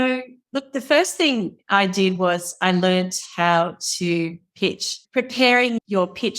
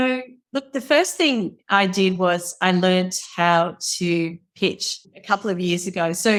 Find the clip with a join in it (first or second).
first